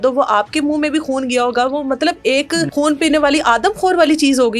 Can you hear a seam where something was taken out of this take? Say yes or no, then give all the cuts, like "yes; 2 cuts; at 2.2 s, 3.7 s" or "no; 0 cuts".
yes; 1 cut; at 2.7 s